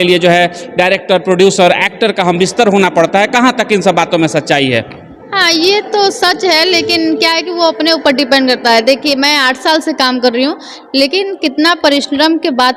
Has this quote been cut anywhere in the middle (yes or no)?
no